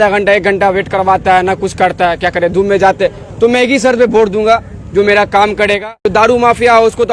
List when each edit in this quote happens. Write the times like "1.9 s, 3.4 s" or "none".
6.0 s